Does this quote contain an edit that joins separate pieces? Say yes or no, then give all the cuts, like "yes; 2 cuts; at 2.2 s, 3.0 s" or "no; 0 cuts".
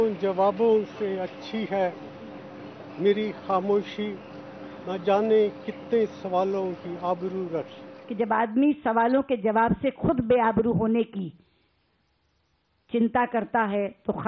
yes; 1 cut; at 8.0 s